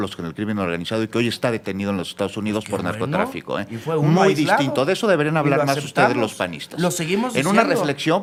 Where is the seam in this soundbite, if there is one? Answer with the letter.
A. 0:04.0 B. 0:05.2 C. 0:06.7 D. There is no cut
D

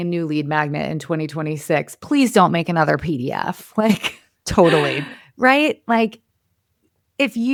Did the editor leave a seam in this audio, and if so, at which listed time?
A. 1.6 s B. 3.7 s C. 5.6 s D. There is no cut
D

